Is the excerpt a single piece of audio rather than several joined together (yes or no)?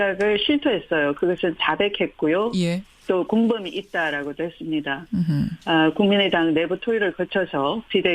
no